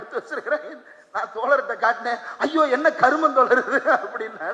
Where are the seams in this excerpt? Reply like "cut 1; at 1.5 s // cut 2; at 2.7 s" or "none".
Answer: none

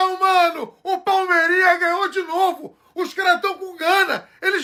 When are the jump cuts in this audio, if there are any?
none

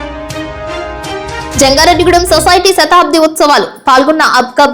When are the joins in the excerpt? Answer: cut 1; at 1.5 s

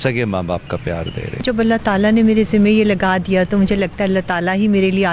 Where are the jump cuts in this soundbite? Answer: cut 1; at 1.4 s

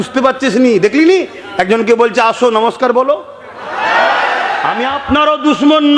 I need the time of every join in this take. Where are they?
cut 1; at 4.7 s

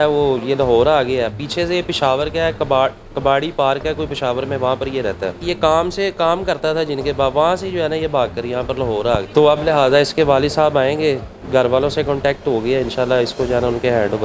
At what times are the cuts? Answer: cut 1; at 5.5 s // cut 2; at 9.3 s

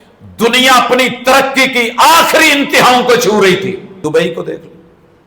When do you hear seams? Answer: cut 1; at 3.9 s

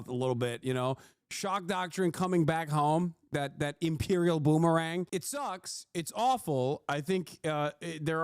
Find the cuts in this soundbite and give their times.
cut 1; at 5.1 s

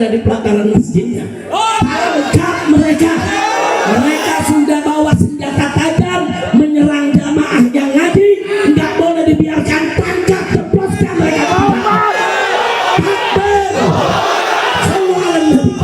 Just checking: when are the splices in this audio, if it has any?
cut 1; at 1.4 s

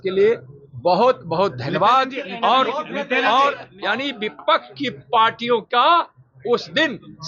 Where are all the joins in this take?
cut 1; at 3.7 s

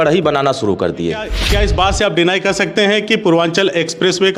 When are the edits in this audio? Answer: cut 1; at 1.4 s

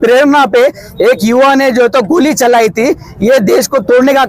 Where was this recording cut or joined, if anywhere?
none

